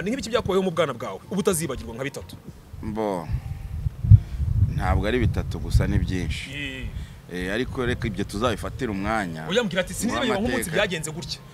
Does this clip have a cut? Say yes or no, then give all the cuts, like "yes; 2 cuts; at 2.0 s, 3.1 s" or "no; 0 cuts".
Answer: no; 0 cuts